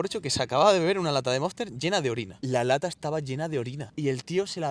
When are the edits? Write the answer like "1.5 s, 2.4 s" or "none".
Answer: 2.3 s